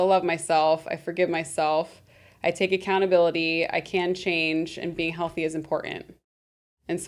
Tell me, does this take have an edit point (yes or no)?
no